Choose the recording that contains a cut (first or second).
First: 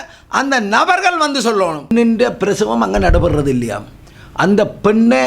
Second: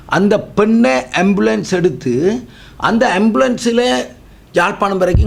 first